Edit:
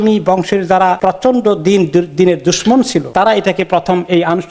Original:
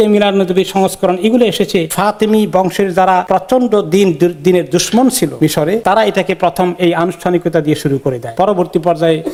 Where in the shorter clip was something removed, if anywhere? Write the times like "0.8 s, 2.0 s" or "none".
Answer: 3.1 s